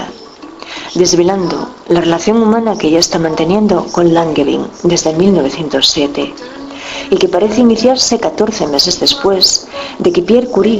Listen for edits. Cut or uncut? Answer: cut